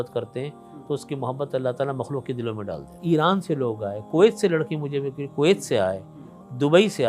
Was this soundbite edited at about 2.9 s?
yes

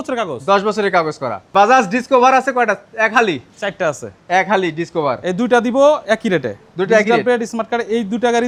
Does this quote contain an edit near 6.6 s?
no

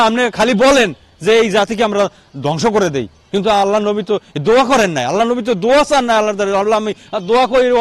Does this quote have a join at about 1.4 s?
no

